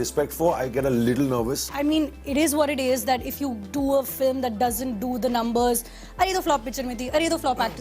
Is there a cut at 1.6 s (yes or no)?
yes